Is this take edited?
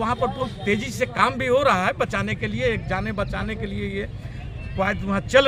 no; 0 cuts

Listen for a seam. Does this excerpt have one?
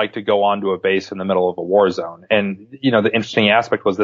no; 0 cuts

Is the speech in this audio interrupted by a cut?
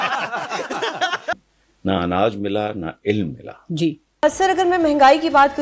yes; 1 cut; at 1.3 s

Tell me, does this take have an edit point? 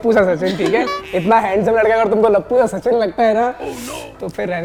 no; 0 cuts

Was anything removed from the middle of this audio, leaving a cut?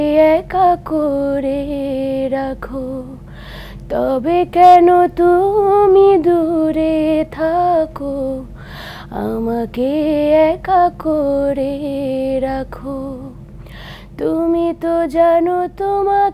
no; 0 cuts

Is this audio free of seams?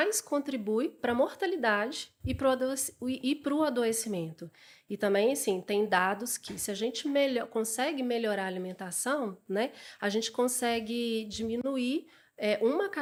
yes; 0 cuts

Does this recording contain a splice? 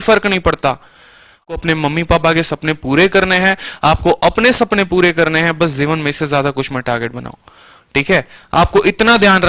yes; 1 cut; at 1.5 s

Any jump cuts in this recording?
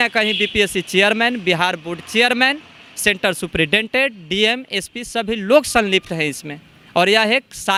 no; 0 cuts

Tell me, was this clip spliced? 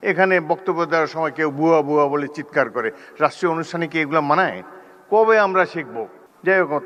no; 0 cuts

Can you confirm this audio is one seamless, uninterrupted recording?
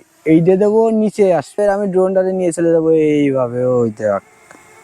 no; 1 cut; at 1.6 s

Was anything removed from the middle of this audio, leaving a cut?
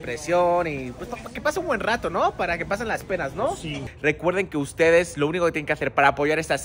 yes; 1 cut; at 3.8 s

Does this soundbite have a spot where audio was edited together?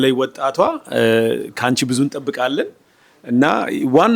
no; 0 cuts

